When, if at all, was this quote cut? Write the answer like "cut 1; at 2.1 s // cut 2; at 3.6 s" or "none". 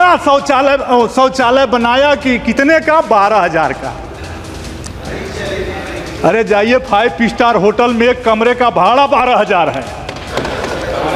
none